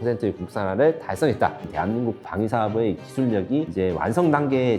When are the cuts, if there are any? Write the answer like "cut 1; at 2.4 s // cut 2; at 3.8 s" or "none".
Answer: cut 1; at 2.1 s // cut 2; at 3.7 s

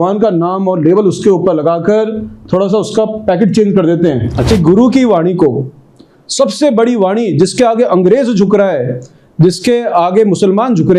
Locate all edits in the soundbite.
cut 1; at 4.5 s

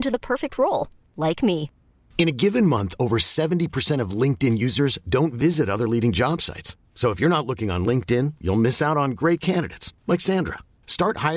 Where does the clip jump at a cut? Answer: none

